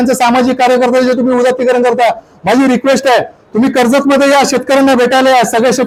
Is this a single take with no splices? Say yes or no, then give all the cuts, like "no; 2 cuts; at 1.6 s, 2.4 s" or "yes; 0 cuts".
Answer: yes; 0 cuts